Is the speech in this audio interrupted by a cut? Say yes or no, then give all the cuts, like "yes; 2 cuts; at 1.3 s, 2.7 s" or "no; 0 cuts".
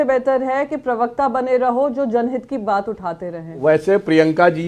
yes; 1 cut; at 3.5 s